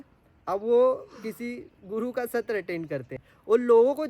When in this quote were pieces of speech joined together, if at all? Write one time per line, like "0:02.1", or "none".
0:03.1

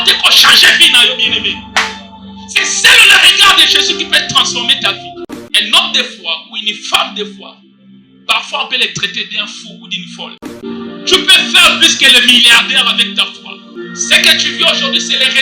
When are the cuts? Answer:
0:05.2
0:10.6
0:13.6

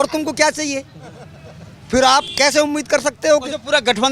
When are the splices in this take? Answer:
none

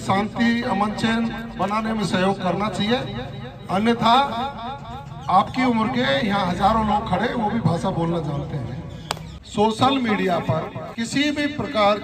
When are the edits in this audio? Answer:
0:09.3
0:10.8

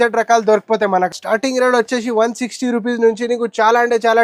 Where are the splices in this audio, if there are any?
0:01.1

